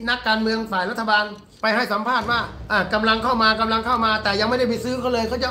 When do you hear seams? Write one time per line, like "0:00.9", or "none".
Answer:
0:01.4
0:02.5